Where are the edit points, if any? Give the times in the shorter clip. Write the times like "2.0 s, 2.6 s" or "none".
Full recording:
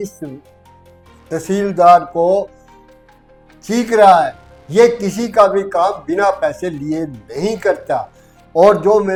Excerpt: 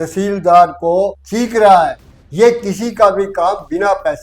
1.2 s